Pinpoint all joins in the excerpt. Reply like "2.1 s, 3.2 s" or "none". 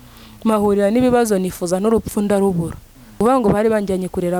3.2 s